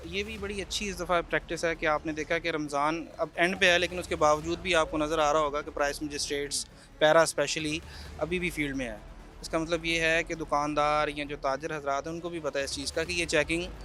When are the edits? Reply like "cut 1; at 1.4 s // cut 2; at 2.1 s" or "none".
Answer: none